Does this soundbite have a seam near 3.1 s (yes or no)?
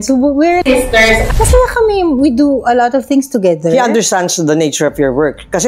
no